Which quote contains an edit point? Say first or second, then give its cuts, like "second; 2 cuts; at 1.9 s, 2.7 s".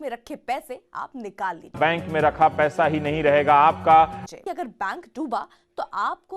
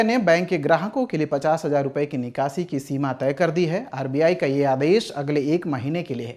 first; 2 cuts; at 1.7 s, 4.2 s